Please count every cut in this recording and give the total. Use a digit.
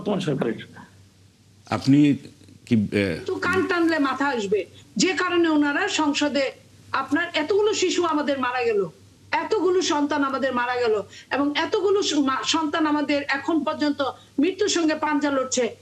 1